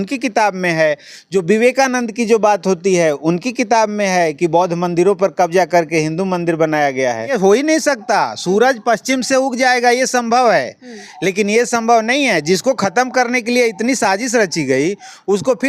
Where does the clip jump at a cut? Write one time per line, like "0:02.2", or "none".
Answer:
0:07.3